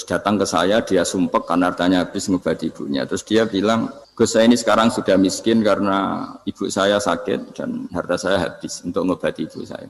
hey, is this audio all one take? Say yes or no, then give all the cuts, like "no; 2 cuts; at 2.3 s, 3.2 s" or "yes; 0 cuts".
no; 1 cut; at 4.0 s